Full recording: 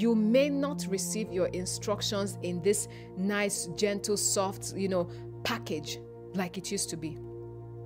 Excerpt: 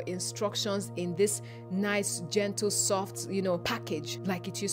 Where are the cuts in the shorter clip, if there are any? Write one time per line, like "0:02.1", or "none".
0:03.8